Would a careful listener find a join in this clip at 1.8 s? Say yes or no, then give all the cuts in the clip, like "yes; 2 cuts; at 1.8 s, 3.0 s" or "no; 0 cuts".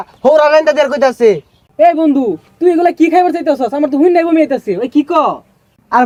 no; 0 cuts